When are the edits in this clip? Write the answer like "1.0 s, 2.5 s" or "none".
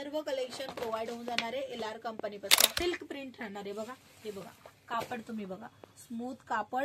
2.8 s